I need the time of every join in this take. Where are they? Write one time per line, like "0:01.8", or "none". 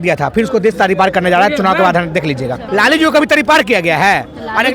0:02.6